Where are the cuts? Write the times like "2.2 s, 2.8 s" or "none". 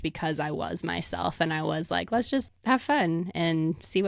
2.5 s